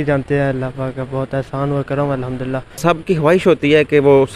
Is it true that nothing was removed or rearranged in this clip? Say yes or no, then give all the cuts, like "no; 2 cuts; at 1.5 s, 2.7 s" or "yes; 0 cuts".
no; 1 cut; at 2.8 s